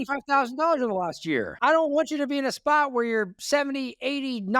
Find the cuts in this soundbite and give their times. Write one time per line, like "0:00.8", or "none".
0:01.5